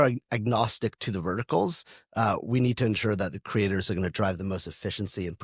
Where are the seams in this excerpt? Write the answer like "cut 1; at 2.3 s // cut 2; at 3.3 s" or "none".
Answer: none